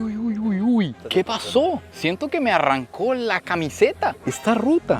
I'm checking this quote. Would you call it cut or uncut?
cut